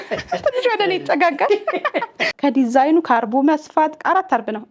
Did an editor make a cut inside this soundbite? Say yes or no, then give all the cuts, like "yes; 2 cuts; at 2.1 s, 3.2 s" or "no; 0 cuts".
yes; 1 cut; at 2.3 s